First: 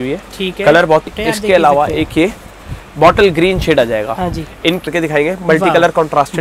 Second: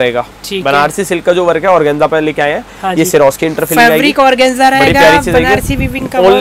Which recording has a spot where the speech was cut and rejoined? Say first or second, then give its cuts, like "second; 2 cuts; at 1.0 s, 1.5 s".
first; 2 cuts; at 1.0 s, 4.9 s